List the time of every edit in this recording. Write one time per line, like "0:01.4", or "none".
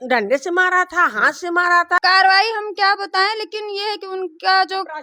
0:02.0

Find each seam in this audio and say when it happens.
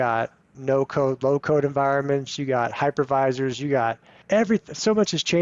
0:04.2

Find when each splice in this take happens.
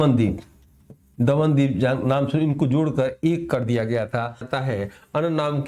0:04.3

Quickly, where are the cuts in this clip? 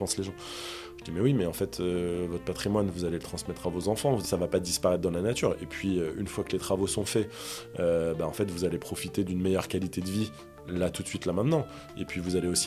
0:04.2

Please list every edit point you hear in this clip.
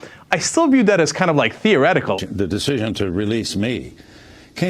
0:02.2

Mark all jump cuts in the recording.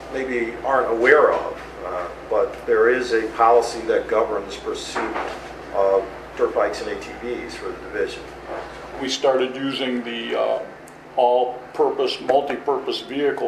0:09.0

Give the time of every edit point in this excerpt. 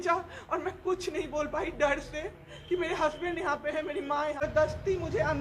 0:04.4

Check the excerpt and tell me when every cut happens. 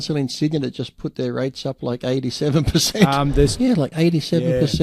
0:03.5

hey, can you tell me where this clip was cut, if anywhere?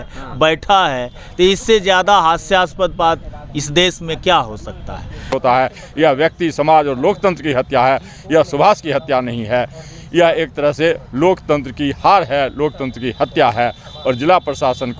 0:05.3

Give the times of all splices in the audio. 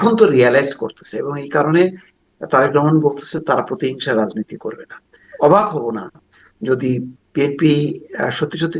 0:05.2

